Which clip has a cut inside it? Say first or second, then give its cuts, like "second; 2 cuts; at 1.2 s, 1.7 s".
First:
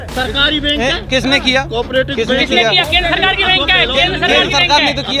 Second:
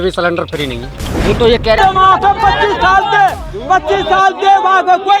second; 1 cut; at 1.8 s